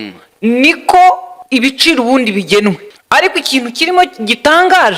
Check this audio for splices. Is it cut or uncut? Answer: cut